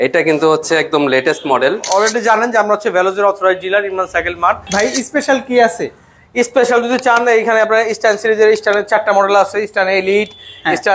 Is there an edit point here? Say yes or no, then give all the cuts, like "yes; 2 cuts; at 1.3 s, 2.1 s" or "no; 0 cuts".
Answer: yes; 2 cuts; at 1.8 s, 4.7 s